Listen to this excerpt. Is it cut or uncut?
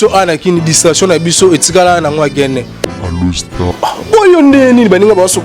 cut